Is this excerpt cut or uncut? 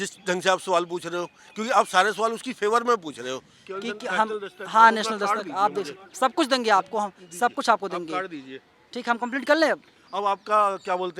cut